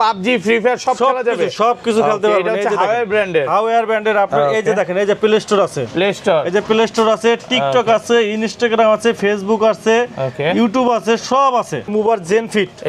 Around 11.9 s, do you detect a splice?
yes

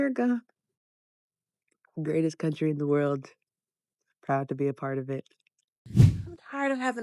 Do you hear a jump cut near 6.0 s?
yes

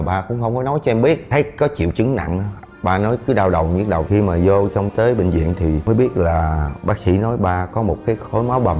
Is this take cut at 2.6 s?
no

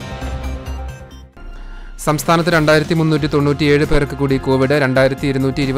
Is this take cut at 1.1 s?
yes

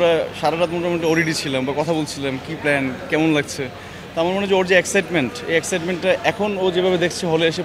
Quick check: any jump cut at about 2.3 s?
no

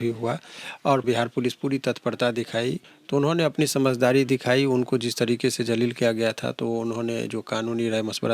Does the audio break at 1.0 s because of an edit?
yes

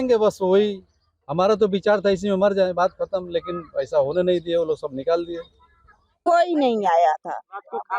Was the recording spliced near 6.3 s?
yes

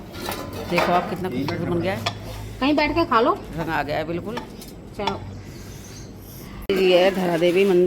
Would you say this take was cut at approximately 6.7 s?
yes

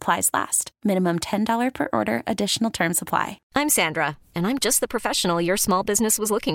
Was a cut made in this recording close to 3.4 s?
yes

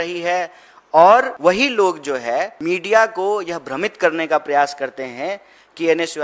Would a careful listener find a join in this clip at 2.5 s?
yes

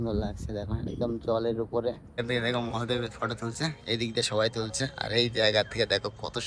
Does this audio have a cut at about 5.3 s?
no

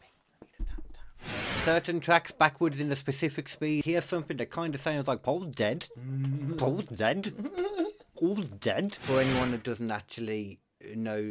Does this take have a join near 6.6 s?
no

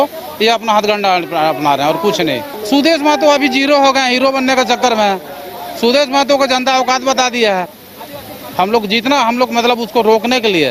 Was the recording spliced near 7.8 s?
yes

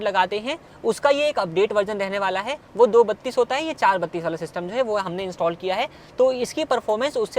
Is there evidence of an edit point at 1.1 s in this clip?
no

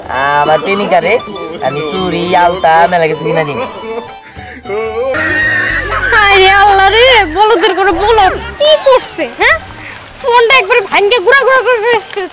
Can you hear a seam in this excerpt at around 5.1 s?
yes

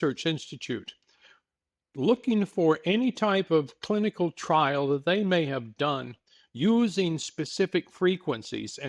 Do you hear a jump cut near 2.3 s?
no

